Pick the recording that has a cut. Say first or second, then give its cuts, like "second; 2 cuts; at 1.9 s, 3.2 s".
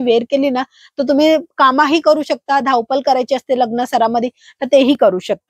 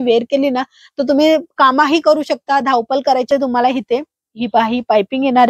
second; 1 cut; at 3.3 s